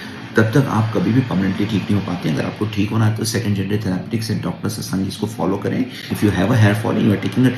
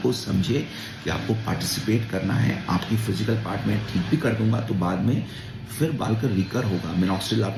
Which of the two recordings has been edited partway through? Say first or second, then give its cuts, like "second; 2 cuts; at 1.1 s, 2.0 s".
first; 1 cut; at 6.1 s